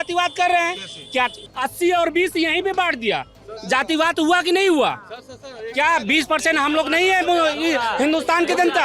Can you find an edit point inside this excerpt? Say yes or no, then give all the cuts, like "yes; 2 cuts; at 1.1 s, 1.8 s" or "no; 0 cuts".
yes; 1 cut; at 1.4 s